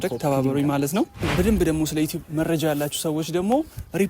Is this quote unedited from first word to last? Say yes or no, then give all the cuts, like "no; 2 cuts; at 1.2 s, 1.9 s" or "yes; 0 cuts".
no; 1 cut; at 1.3 s